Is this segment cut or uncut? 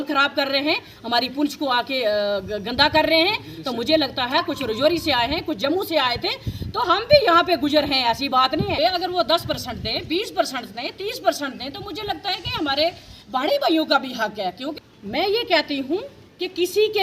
cut